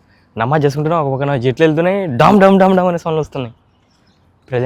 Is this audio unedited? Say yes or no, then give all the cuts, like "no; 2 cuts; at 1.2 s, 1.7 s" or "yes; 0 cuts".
yes; 0 cuts